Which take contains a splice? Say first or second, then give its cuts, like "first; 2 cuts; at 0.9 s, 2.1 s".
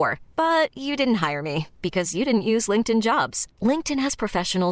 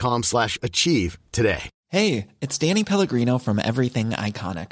second; 1 cut; at 1.7 s